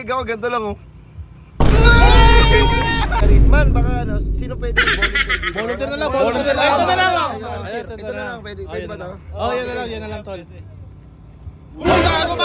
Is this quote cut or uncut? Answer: cut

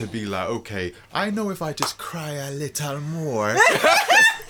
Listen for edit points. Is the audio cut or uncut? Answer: uncut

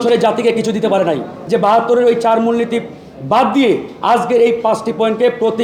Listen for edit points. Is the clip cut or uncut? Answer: cut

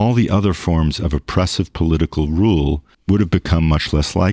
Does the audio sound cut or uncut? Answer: cut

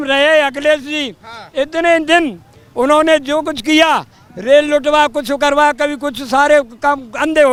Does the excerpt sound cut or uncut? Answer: uncut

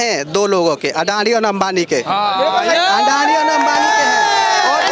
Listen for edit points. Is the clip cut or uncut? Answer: uncut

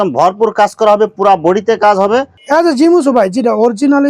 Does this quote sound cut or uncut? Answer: cut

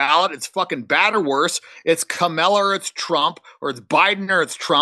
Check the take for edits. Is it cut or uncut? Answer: uncut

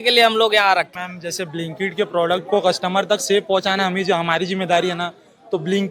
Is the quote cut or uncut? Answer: cut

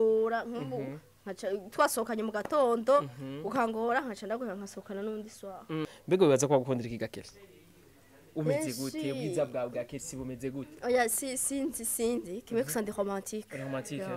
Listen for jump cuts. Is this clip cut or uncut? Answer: cut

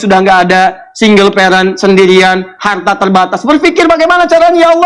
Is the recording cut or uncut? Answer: uncut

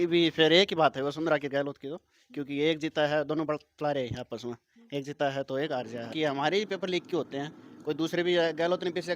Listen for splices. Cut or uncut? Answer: cut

